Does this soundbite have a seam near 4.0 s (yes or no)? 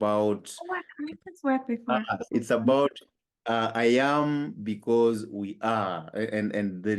no